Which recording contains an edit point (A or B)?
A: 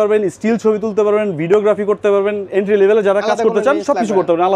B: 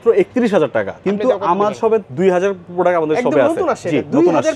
B